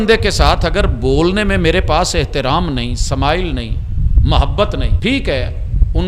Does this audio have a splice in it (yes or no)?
yes